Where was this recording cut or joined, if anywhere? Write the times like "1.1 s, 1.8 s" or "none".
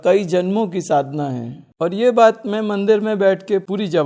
none